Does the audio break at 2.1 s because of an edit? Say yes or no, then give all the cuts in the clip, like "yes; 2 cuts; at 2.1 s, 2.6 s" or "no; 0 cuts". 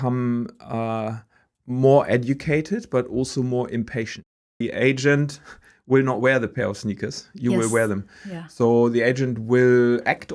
no; 1 cut; at 4.6 s